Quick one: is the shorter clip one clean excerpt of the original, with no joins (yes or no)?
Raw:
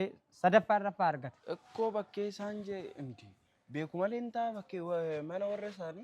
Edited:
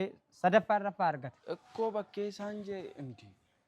yes